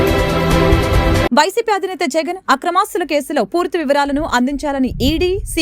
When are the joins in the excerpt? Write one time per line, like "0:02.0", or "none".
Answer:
0:01.1